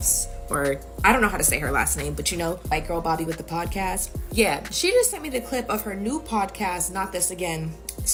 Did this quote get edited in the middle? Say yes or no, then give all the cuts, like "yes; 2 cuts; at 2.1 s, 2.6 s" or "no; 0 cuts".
no; 0 cuts